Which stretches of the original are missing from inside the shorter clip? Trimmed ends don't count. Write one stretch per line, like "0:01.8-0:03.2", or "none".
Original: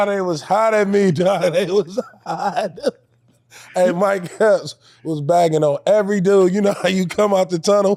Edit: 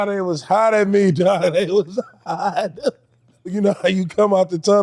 0:03.6-0:06.6